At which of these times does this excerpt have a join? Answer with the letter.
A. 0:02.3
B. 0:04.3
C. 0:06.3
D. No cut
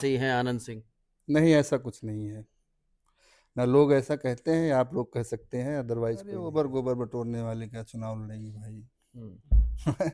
C